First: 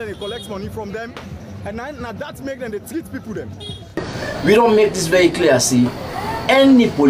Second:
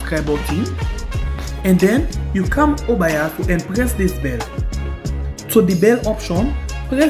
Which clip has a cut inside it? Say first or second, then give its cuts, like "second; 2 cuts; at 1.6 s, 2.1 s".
first; 1 cut; at 4.1 s